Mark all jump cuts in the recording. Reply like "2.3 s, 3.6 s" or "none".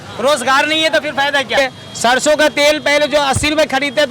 1.5 s